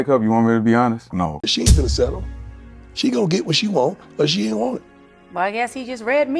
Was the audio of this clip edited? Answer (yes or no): yes